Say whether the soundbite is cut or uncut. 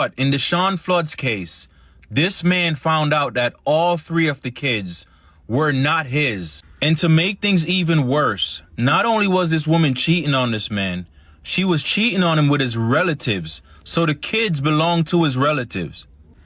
cut